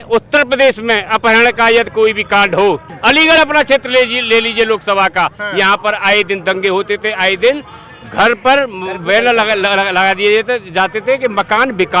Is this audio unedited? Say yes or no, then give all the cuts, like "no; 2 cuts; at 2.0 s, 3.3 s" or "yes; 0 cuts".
no; 1 cut; at 2.8 s